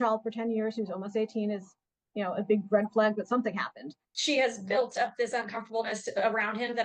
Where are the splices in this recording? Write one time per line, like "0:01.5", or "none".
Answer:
0:04.1